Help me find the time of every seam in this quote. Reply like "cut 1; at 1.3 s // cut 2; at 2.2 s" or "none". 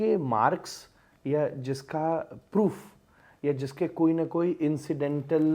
none